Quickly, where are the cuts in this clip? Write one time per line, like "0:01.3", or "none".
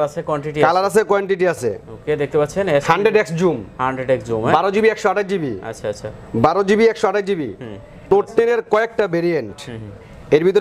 0:08.1